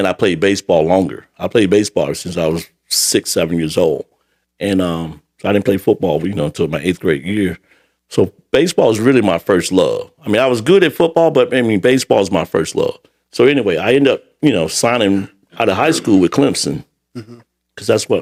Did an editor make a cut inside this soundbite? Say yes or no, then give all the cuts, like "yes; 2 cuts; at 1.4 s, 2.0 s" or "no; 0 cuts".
no; 0 cuts